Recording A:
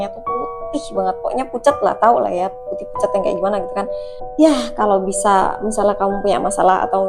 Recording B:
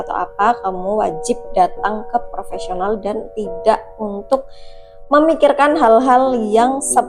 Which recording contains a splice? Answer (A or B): A